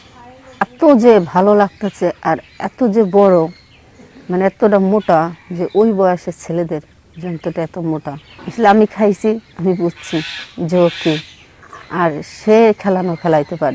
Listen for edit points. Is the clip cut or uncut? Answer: cut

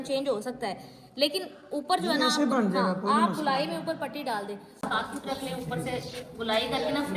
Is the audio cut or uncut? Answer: cut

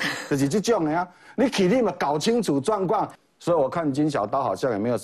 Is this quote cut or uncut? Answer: cut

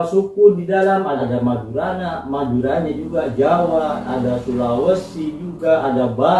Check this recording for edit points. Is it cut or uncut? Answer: cut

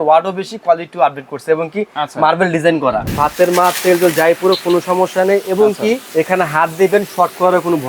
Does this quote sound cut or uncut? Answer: cut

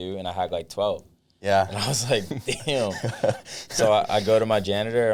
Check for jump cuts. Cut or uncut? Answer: uncut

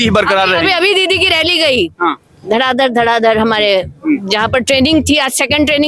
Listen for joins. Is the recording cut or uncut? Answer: uncut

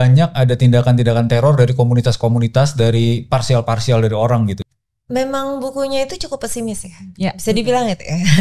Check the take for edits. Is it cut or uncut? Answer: cut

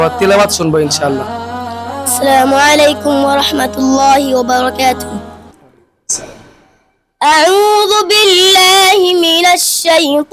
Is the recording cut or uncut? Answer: uncut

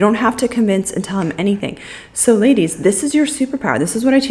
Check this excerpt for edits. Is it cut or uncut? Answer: uncut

